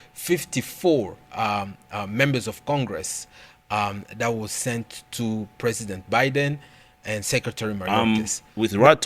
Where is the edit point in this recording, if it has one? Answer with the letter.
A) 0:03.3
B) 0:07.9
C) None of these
B